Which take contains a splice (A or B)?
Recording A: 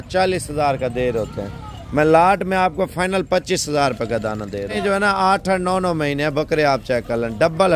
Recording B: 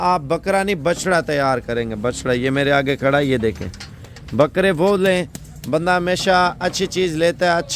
A